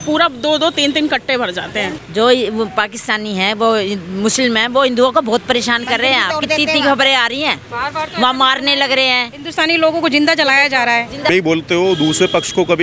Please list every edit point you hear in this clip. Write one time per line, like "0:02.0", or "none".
0:02.0
0:11.3